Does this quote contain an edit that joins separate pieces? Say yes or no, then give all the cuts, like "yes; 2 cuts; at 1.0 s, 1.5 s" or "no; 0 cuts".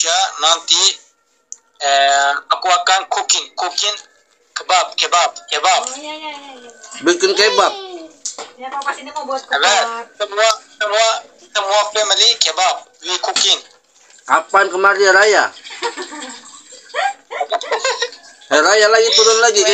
no; 0 cuts